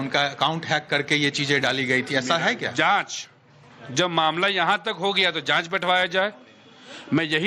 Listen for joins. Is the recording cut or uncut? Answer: uncut